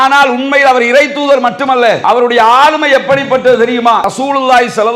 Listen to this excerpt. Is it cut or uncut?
cut